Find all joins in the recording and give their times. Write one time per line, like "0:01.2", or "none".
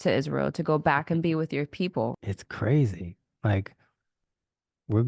0:02.1